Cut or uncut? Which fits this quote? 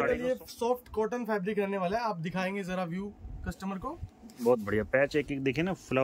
uncut